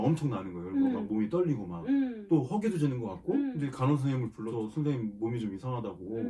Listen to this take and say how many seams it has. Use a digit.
3